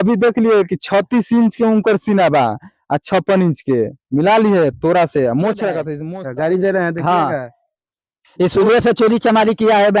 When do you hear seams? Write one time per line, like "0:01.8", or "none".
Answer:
0:06.0